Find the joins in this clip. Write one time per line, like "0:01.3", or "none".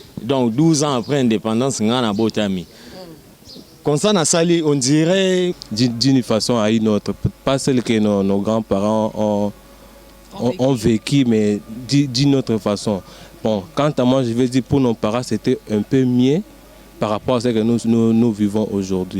0:05.6